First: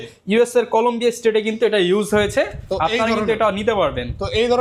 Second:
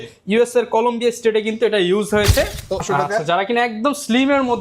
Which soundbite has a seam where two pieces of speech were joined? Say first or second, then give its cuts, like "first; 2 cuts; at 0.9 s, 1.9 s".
second; 1 cut; at 2.8 s